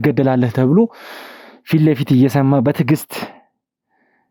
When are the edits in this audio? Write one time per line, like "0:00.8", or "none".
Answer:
none